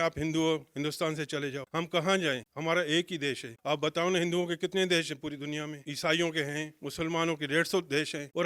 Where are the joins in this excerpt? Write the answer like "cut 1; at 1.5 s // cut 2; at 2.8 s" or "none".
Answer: none